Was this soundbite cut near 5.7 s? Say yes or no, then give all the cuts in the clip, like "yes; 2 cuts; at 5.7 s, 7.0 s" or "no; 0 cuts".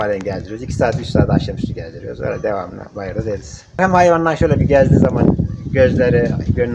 no; 1 cut; at 3.8 s